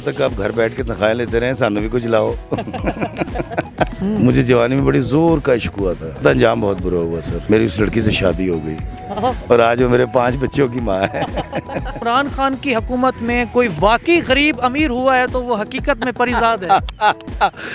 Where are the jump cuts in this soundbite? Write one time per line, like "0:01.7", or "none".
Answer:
0:03.9
0:06.2
0:07.3
0:12.0